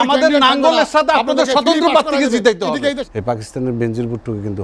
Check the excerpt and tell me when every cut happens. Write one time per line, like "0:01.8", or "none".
0:03.0